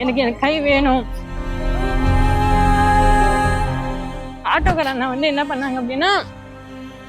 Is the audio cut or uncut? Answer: cut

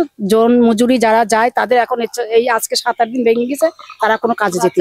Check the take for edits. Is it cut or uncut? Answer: uncut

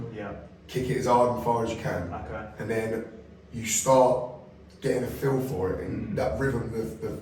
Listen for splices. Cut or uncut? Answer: uncut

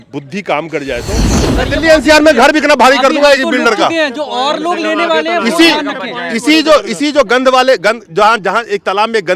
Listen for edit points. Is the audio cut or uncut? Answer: cut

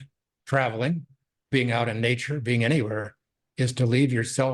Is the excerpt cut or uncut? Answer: uncut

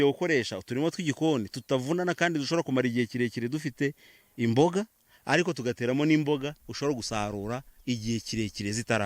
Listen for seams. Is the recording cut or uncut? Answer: uncut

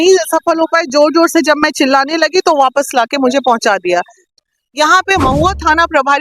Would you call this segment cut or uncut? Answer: cut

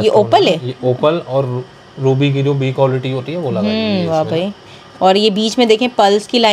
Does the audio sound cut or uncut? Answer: uncut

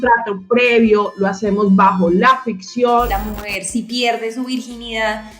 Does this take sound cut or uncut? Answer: cut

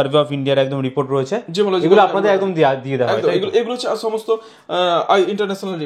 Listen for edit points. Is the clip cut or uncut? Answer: uncut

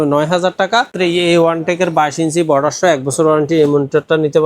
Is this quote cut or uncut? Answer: cut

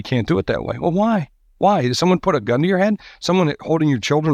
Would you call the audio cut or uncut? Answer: uncut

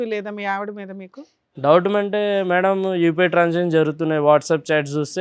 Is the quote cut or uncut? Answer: uncut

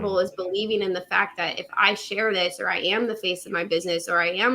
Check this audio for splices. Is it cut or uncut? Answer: uncut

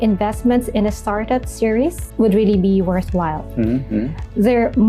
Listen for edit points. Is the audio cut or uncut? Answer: uncut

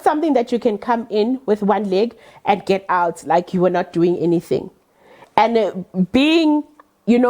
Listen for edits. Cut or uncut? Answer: uncut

